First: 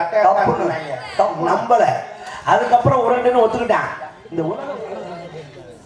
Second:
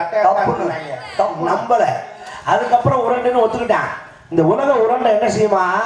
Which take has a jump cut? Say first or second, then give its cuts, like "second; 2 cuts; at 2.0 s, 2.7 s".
first; 1 cut; at 4.7 s